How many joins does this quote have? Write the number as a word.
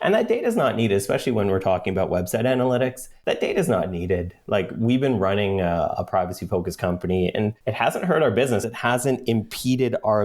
three